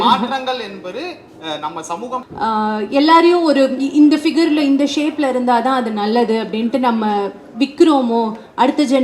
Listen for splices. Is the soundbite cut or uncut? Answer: cut